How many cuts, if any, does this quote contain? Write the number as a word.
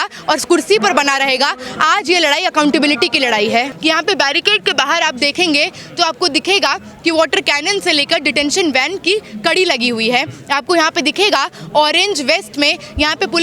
one